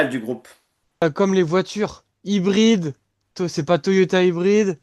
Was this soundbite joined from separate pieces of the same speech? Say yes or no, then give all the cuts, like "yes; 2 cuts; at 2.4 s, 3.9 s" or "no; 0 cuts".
yes; 1 cut; at 1.0 s